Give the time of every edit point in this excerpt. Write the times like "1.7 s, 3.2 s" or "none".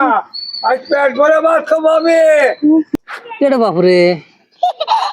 2.9 s